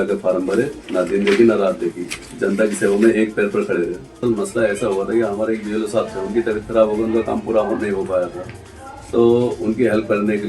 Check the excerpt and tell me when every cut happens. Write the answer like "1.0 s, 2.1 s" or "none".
4.0 s